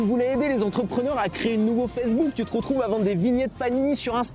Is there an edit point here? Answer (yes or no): no